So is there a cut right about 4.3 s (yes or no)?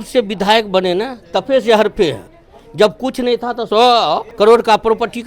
yes